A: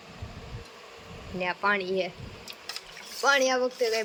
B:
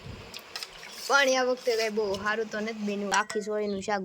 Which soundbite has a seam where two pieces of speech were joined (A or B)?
B